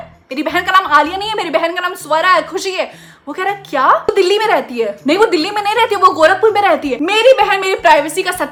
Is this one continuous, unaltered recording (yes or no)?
yes